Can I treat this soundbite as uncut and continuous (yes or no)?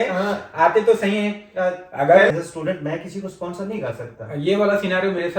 no